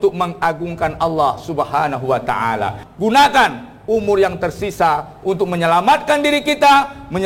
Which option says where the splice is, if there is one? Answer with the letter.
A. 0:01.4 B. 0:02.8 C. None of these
B